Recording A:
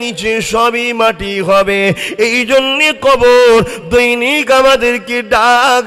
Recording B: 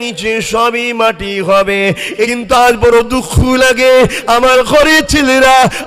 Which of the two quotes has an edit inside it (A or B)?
B